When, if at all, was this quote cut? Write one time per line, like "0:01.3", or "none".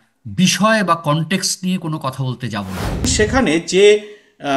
0:03.1